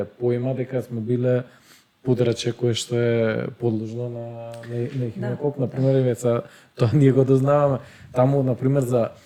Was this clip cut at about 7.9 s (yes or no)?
no